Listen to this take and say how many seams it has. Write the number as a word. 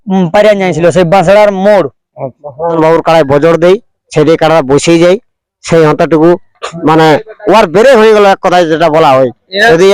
one